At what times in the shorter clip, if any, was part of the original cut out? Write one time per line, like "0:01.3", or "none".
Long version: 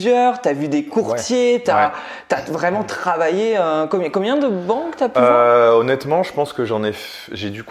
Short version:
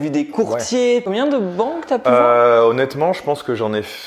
0:01.0